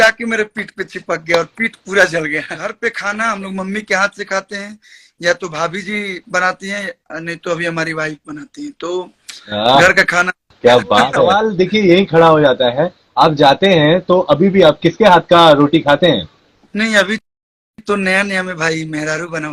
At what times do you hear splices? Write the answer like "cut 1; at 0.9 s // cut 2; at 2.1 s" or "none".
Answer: cut 1; at 2.8 s // cut 2; at 11.5 s